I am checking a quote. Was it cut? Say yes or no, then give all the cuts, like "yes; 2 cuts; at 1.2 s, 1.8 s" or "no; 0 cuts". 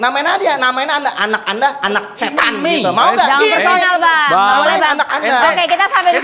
no; 0 cuts